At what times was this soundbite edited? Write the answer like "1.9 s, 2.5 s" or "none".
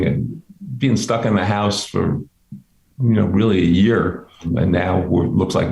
4.5 s